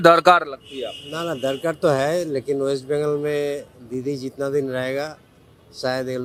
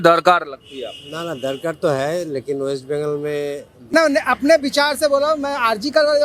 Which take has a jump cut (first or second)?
second